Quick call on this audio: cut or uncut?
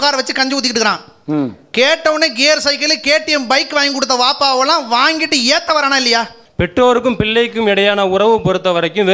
cut